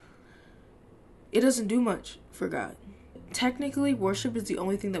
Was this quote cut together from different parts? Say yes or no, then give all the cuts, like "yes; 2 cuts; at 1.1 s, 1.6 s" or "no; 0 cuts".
yes; 1 cut; at 3.2 s